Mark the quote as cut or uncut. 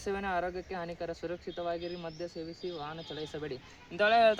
uncut